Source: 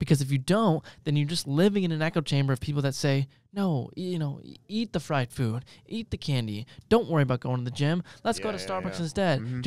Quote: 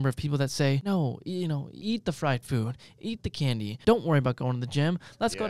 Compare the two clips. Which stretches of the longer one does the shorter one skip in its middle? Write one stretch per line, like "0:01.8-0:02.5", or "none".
0:03.3-0:03.5
0:04.4-0:04.6
0:06.6-0:06.8

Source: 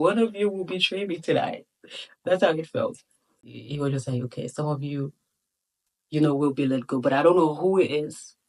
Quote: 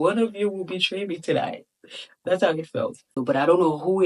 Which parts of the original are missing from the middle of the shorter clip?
0:03.1-0:06.9

